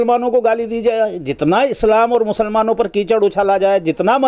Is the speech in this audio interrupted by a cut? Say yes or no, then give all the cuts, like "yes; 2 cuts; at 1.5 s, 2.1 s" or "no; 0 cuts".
no; 0 cuts